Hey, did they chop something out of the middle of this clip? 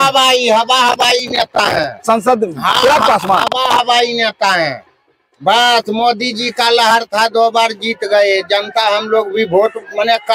no; 0 cuts

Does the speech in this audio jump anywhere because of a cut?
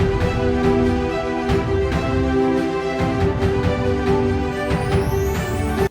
no; 0 cuts

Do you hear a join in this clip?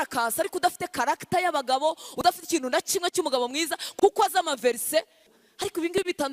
yes; 1 cut; at 5.3 s

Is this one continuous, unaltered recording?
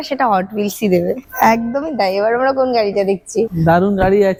yes; 0 cuts

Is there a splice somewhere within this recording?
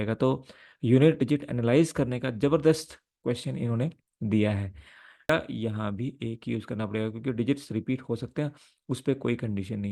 yes; 1 cut; at 5.3 s

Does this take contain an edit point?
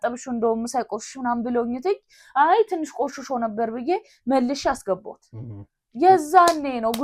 no; 0 cuts

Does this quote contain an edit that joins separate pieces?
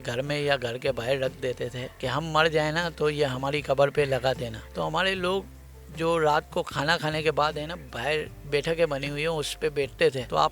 no; 0 cuts

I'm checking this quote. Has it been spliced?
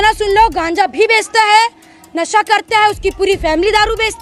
no; 0 cuts

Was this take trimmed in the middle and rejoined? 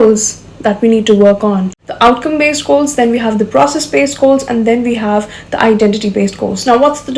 yes; 1 cut; at 1.8 s

